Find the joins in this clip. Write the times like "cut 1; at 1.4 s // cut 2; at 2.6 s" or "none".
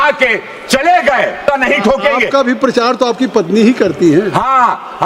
cut 1; at 1.4 s